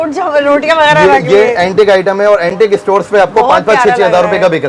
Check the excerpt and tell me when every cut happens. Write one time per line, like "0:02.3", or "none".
none

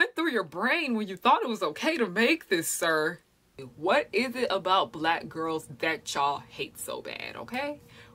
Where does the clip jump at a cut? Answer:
0:03.4

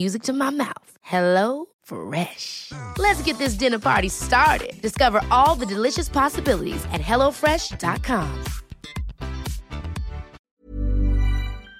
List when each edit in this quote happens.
0:10.4

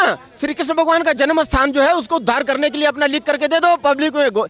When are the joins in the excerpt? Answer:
none

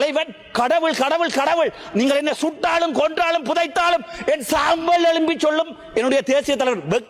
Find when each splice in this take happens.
none

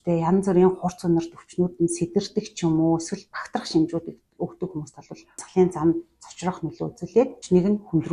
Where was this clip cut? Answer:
none

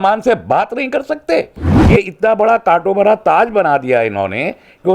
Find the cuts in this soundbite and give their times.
0:01.7

